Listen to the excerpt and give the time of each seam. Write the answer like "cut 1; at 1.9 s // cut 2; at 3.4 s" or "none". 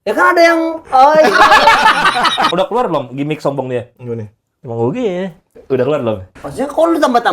cut 1; at 2.5 s // cut 2; at 6.4 s